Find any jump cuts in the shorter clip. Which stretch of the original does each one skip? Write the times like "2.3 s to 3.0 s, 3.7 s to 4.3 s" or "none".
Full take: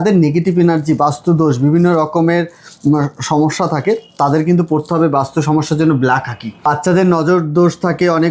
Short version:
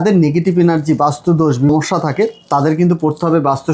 1.7 s to 3.4 s